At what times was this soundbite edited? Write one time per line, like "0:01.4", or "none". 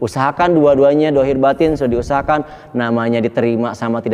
0:01.0